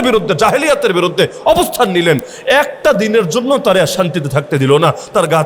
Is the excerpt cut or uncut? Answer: uncut